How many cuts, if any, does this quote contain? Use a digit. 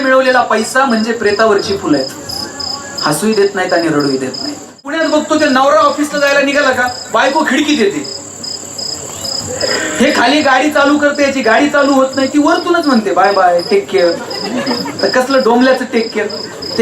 1